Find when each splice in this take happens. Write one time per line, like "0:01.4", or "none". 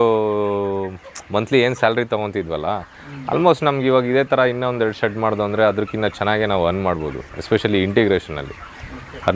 none